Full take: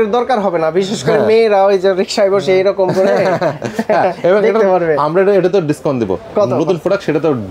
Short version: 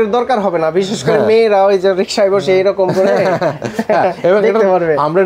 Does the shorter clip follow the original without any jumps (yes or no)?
yes